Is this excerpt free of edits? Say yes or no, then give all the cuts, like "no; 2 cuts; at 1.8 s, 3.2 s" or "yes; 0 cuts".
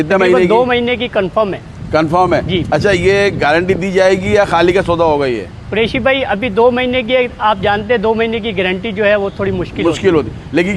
yes; 0 cuts